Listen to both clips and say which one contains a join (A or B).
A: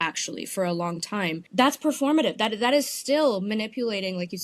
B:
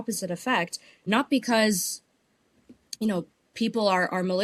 A